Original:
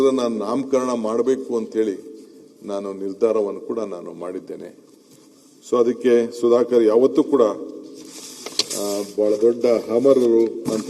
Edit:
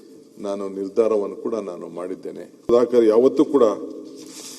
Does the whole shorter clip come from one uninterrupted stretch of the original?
no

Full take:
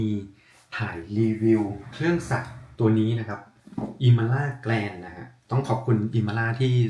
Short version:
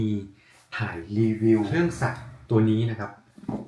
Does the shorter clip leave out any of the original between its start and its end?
yes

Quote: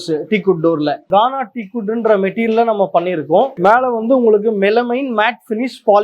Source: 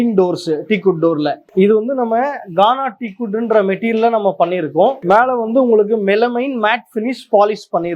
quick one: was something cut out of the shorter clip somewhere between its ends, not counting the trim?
yes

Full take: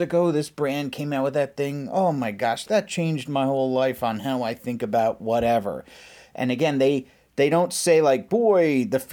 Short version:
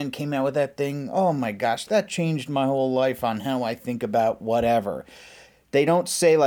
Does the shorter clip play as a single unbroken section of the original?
no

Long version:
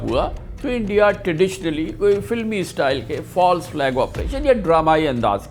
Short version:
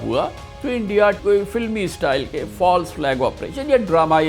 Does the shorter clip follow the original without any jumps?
no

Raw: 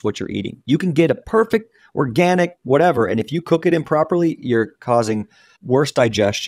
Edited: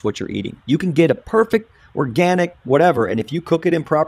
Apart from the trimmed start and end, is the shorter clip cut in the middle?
no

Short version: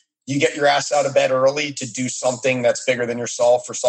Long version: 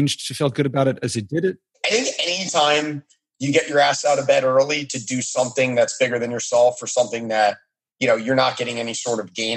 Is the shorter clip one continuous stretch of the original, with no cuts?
yes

